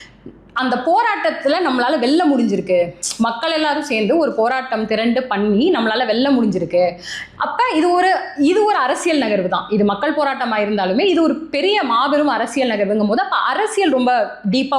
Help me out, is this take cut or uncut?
uncut